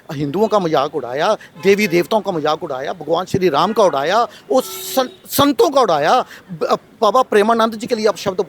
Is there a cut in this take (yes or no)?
no